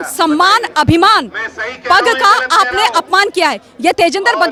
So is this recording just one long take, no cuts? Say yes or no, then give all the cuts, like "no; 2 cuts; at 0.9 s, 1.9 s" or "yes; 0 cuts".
yes; 0 cuts